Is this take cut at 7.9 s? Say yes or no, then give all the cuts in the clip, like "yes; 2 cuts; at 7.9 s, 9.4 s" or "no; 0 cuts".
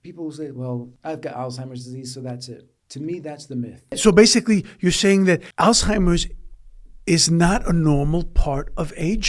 no; 4 cuts; at 0.9 s, 2.8 s, 3.9 s, 5.5 s